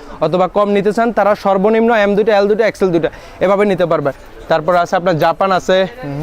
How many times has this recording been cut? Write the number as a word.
one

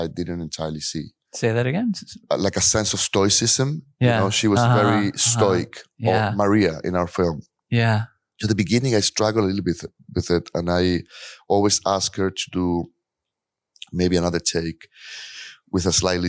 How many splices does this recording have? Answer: zero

